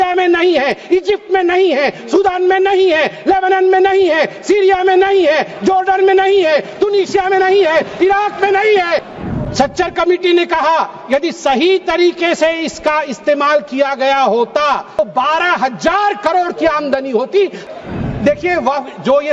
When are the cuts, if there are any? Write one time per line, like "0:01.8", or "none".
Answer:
0:09.1
0:15.0
0:17.6